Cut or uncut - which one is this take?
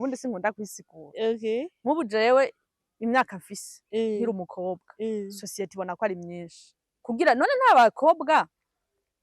cut